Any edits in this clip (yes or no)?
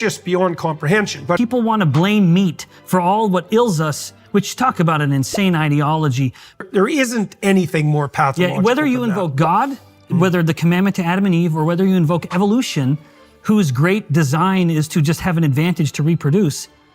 yes